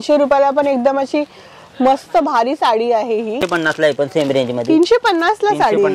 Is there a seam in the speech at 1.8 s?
no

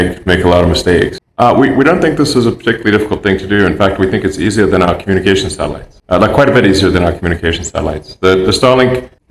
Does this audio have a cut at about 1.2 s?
yes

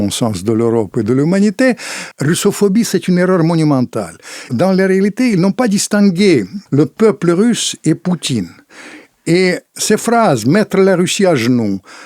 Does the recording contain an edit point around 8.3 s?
no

